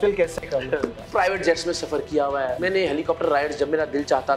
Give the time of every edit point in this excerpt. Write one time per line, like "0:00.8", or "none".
0:01.0
0:02.6